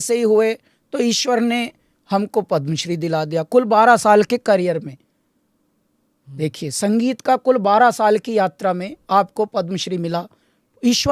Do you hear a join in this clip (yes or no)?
no